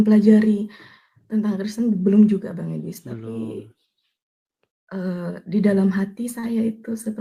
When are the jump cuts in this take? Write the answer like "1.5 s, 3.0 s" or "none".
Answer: none